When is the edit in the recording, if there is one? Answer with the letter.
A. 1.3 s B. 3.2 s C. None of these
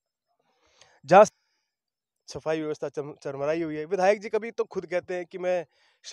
A